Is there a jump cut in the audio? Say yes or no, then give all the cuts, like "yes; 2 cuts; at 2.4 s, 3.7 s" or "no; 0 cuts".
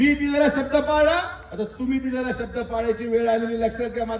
no; 0 cuts